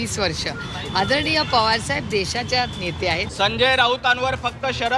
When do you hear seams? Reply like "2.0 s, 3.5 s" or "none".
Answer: 3.3 s